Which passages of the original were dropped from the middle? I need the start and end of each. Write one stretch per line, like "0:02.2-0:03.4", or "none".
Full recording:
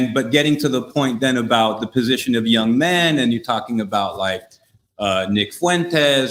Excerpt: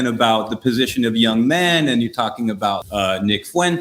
0:04.1-0:04.9